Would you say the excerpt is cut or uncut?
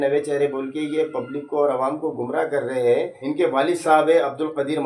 cut